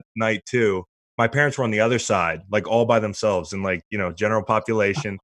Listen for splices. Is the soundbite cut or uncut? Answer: cut